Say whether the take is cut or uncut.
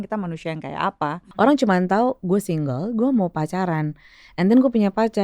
cut